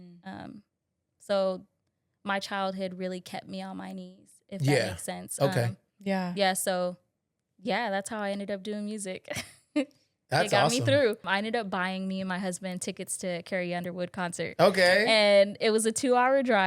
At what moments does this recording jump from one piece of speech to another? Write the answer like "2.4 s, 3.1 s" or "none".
11.2 s